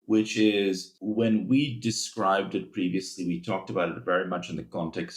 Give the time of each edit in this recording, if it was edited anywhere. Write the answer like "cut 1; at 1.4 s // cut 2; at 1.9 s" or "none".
cut 1; at 0.9 s